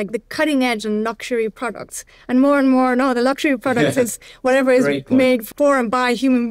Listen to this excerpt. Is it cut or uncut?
cut